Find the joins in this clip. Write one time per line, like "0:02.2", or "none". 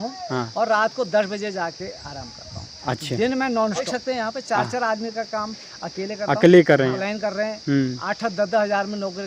0:03.8
0:07.0